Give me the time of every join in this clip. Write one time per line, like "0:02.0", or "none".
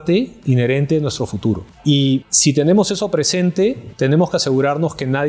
0:02.3
0:03.9